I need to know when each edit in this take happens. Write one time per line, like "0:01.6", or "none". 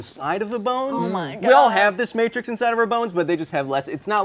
none